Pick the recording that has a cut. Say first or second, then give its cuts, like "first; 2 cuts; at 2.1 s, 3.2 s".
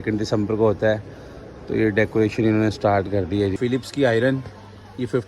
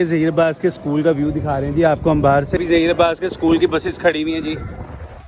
first; 1 cut; at 3.6 s